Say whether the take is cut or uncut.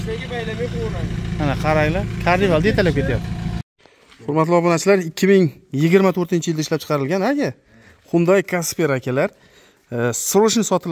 cut